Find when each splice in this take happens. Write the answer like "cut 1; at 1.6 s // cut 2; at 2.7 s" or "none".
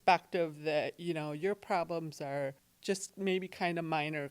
cut 1; at 2.7 s